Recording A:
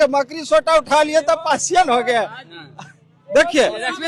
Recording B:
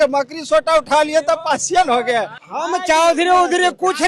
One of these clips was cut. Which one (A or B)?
B